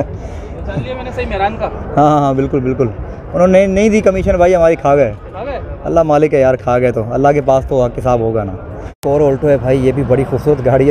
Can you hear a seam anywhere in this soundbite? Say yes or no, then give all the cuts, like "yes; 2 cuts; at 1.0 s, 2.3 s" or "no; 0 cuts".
yes; 1 cut; at 9.0 s